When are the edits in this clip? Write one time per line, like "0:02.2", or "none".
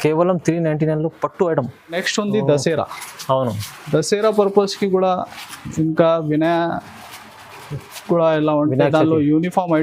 0:02.0